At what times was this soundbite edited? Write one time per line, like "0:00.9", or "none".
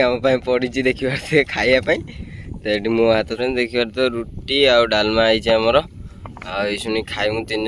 0:03.2